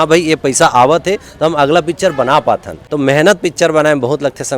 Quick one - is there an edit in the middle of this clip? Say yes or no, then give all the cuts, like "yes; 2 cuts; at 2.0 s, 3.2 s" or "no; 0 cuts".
yes; 1 cut; at 2.8 s